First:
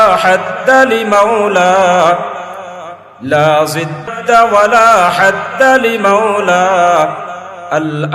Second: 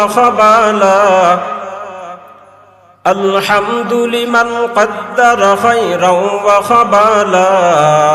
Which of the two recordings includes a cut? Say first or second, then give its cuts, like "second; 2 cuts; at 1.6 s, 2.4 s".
first; 1 cut; at 4.1 s